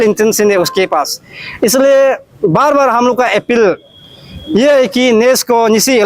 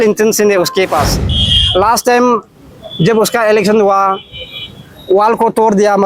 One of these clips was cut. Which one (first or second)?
second